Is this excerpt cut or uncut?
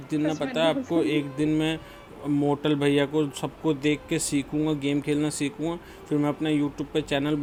uncut